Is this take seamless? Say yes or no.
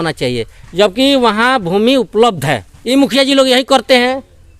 no